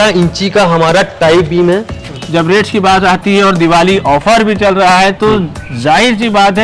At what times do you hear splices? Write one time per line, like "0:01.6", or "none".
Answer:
0:02.1